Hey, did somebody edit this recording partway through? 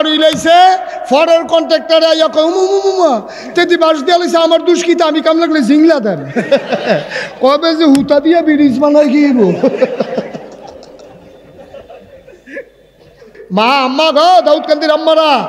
yes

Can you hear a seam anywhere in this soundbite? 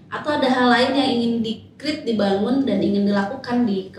no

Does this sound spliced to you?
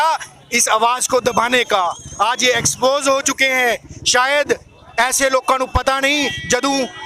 no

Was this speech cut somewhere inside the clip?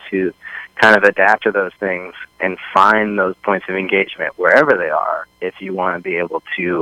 no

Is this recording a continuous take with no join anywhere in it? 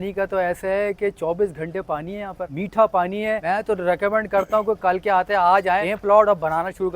no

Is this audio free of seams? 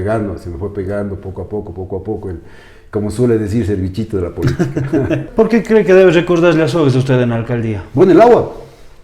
no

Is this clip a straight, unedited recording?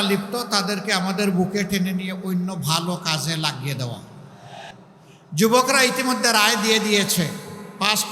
no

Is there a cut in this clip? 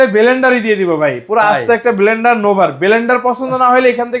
no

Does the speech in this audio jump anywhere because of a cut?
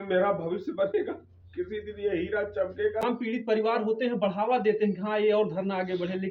yes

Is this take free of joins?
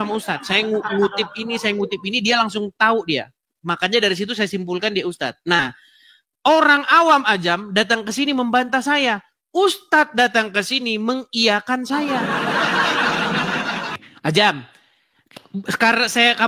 no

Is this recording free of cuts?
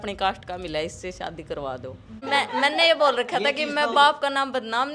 no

